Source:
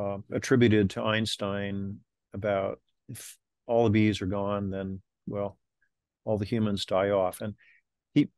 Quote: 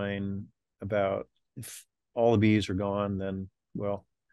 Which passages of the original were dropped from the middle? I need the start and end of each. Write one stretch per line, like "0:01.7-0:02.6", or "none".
none